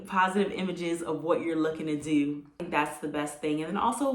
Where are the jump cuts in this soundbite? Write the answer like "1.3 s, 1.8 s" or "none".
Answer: 2.6 s